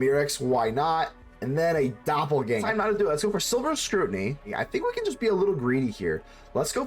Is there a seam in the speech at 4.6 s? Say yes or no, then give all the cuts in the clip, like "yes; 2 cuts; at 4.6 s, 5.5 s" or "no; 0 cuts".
yes; 2 cuts; at 2.6 s, 4.6 s